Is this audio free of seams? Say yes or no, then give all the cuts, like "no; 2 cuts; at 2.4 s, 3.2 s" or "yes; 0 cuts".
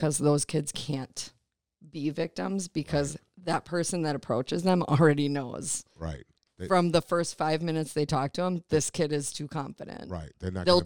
yes; 0 cuts